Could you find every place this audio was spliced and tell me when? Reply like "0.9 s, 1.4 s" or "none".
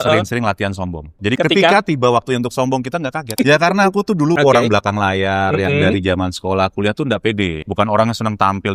1.1 s, 3.2 s, 4.4 s, 7.7 s